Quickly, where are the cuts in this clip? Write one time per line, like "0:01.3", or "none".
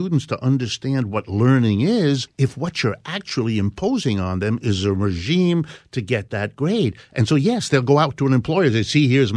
0:02.3